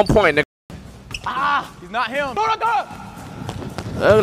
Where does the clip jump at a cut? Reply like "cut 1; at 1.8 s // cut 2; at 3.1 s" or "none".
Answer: cut 1; at 2.3 s